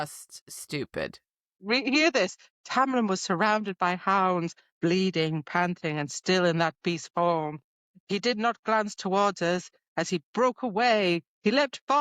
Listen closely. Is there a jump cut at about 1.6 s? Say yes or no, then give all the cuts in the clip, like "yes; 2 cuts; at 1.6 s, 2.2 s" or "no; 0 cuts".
yes; 1 cut; at 1.6 s